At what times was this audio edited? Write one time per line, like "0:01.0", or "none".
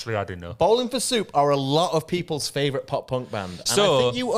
none